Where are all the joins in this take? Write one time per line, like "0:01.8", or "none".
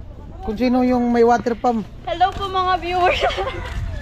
none